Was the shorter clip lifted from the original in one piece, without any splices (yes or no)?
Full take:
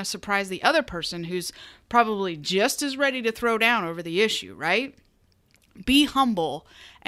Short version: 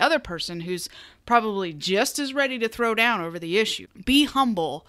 no